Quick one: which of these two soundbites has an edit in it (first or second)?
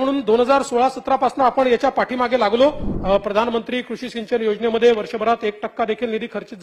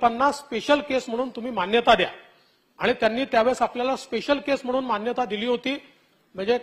first